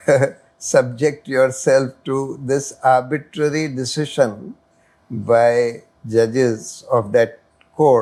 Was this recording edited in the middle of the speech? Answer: no; 0 cuts

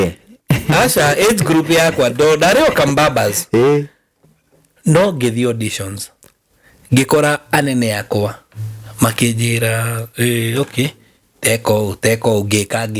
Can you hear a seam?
no; 0 cuts

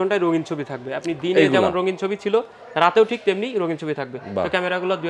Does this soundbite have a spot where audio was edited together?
no; 0 cuts

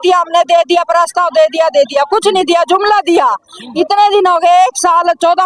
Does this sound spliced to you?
no; 0 cuts

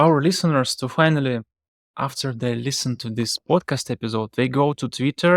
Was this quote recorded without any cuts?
yes; 0 cuts

